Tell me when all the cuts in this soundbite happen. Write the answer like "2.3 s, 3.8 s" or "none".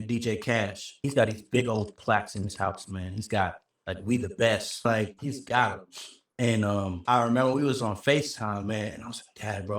1.0 s